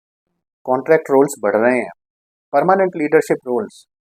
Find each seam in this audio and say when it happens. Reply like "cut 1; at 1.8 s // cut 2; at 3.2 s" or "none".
none